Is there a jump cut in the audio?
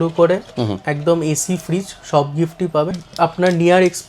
yes; 1 cut; at 3.0 s

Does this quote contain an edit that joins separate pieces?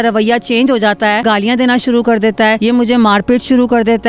yes; 2 cuts; at 1.2 s, 2.6 s

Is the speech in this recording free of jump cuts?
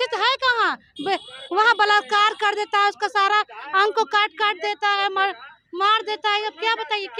yes; 0 cuts

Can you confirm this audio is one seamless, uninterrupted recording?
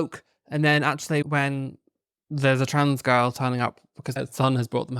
no; 2 cuts; at 1.2 s, 4.2 s

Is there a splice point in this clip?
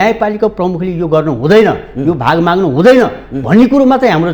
no; 0 cuts

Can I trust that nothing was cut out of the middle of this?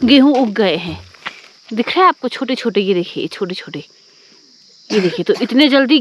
yes; 0 cuts

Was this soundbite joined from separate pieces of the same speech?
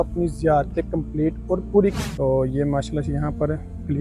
yes; 1 cut; at 2.0 s

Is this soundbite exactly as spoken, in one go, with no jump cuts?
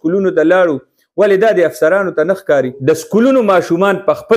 no; 1 cut; at 2.8 s

